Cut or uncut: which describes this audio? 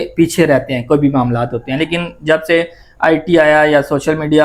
uncut